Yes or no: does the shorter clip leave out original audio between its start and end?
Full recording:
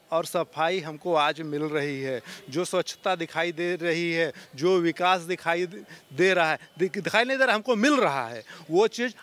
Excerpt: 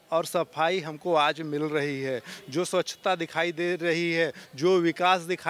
no